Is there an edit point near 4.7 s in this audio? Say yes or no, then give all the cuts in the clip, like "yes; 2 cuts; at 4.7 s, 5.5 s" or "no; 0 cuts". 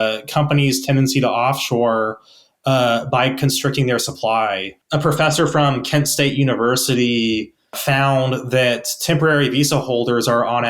yes; 2 cuts; at 4.7 s, 7.8 s